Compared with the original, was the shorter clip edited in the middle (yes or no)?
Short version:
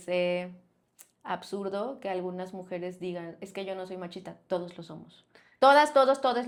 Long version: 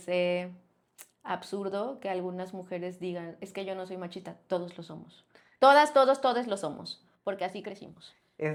no